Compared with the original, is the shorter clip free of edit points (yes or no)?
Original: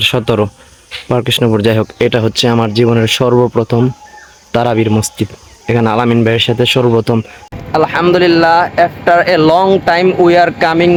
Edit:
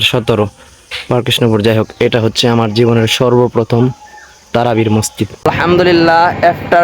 no